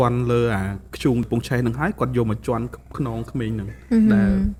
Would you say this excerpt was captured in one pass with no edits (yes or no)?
yes